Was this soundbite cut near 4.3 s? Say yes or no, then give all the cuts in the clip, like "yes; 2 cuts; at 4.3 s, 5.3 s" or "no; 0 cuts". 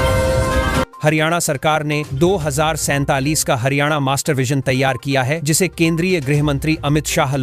no; 1 cut; at 0.9 s